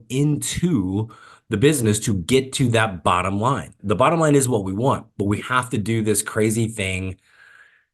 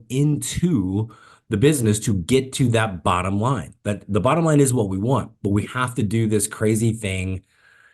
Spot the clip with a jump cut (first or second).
first